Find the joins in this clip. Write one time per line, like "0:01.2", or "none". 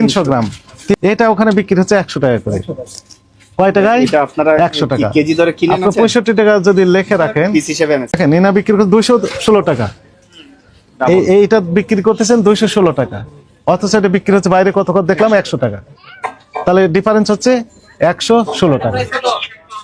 0:01.0
0:08.2